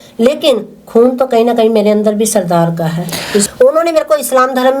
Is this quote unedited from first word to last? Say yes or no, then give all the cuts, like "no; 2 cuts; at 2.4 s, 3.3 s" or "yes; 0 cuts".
no; 1 cut; at 3.5 s